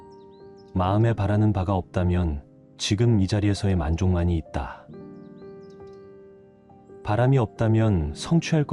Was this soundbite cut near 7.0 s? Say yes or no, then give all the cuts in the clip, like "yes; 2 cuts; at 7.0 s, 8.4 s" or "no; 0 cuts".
yes; 3 cuts; at 0.7 s, 4.8 s, 7.0 s